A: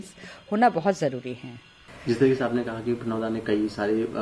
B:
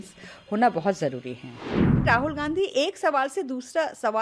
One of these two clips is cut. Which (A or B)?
B